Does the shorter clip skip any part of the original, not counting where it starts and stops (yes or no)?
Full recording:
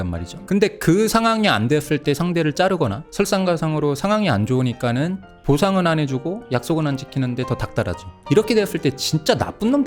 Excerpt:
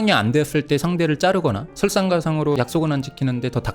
yes